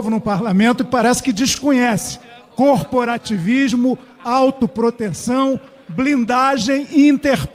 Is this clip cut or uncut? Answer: uncut